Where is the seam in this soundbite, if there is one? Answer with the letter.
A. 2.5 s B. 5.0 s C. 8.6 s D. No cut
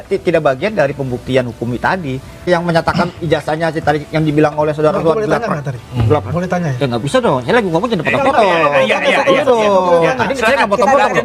A